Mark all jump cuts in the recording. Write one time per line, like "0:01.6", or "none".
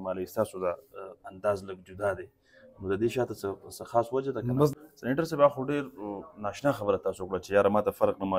0:04.7